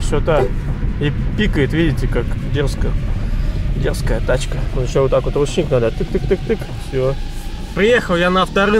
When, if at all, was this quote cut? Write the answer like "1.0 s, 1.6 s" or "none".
none